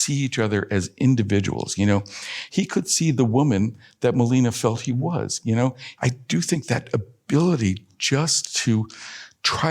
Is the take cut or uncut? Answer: cut